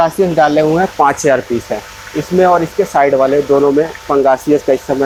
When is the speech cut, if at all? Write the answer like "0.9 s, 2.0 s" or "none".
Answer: none